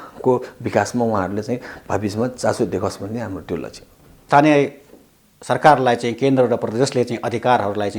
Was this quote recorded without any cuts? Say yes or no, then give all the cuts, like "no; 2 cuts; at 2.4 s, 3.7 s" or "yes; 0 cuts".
no; 1 cut; at 4.2 s